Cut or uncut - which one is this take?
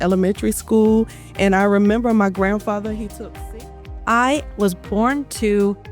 cut